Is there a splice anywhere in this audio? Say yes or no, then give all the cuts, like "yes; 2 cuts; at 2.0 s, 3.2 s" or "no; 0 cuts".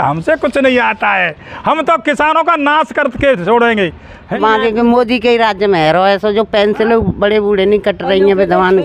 yes; 1 cut; at 4.3 s